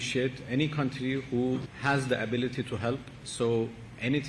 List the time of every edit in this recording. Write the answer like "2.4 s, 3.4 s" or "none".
1.7 s, 3.2 s